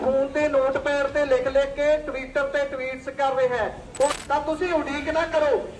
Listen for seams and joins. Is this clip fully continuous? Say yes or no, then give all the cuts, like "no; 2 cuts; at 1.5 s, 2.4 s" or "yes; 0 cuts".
no; 1 cut; at 4.2 s